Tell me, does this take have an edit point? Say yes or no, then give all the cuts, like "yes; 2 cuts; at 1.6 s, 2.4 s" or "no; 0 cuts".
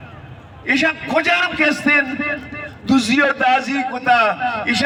no; 0 cuts